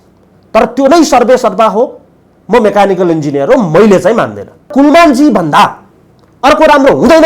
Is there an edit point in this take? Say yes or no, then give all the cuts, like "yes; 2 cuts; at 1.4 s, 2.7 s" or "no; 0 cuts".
yes; 1 cut; at 4.7 s